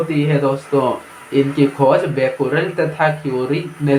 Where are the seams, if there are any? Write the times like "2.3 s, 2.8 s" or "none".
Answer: none